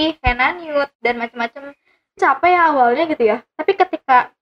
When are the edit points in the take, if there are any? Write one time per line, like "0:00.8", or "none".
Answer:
0:02.2